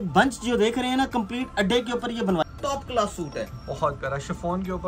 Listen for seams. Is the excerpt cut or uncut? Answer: cut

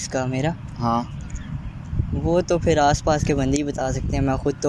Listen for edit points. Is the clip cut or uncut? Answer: uncut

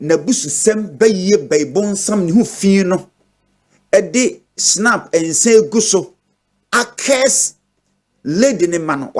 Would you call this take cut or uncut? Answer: uncut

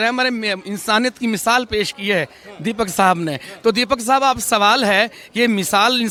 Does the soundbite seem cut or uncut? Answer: uncut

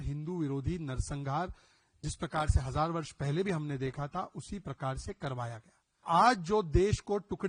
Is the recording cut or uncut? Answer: cut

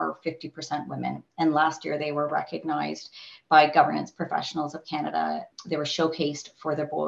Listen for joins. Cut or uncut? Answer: cut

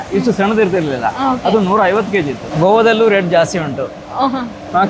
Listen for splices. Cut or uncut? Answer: cut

